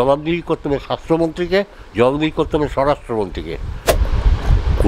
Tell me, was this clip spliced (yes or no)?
yes